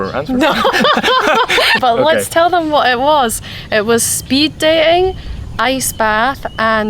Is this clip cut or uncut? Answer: cut